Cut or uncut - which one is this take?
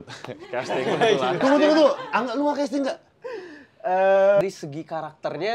cut